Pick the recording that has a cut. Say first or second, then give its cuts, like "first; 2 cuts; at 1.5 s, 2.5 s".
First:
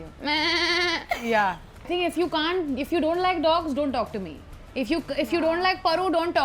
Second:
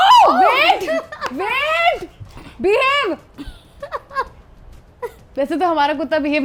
first; 1 cut; at 1.9 s